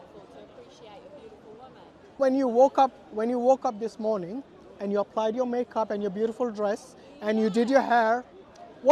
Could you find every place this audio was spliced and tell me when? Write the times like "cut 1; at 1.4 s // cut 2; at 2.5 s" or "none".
cut 1; at 2.2 s

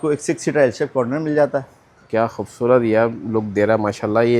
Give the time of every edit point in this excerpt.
none

